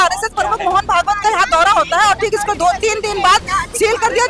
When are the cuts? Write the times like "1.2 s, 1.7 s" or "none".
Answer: none